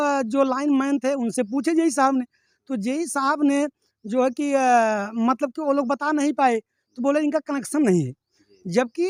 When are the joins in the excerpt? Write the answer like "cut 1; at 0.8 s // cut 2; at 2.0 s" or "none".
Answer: none